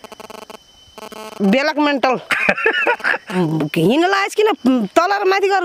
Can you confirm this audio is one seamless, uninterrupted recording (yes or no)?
no